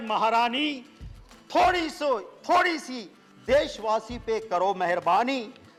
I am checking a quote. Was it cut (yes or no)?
no